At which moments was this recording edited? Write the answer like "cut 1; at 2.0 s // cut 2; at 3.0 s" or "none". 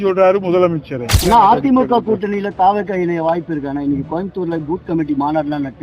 cut 1; at 1.1 s

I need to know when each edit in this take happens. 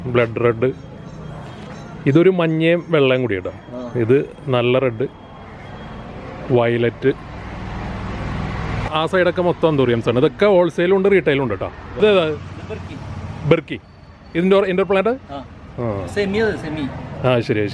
cut 1; at 8.9 s // cut 2; at 12.0 s

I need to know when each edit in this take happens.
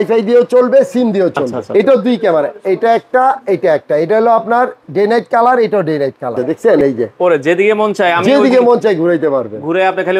cut 1; at 1.5 s // cut 2; at 6.6 s

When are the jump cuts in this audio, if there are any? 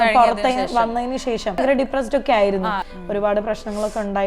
cut 1; at 1.6 s // cut 2; at 2.8 s

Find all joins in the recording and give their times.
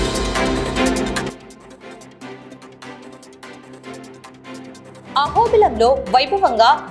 cut 1; at 0.9 s // cut 2; at 1.3 s // cut 3; at 3.9 s

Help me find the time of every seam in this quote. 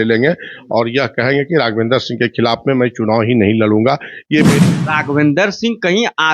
cut 1; at 4.5 s

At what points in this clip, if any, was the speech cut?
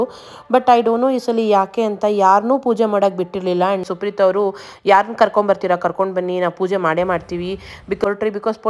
cut 1; at 3.8 s // cut 2; at 8.0 s

